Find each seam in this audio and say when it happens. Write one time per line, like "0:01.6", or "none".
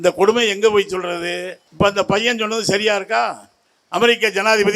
0:01.6